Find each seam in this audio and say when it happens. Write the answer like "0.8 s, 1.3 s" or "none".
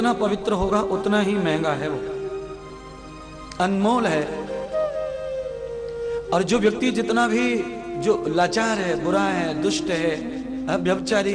none